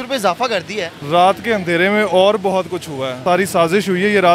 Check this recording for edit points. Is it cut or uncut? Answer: cut